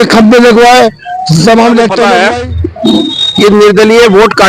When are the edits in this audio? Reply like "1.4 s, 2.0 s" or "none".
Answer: 2.1 s